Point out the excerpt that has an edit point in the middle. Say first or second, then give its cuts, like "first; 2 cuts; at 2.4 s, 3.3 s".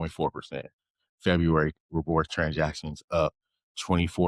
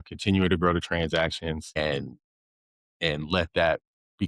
second; 1 cut; at 1.8 s